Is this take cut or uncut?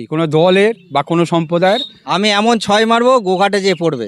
cut